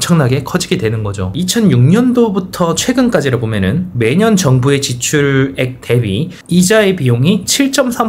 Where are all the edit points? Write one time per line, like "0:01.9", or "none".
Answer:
0:01.4